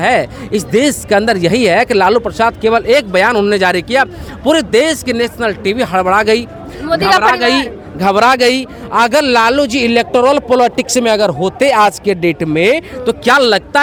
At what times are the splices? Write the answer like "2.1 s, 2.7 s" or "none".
none